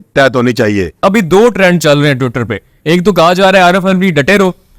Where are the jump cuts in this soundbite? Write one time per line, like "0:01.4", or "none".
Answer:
0:01.0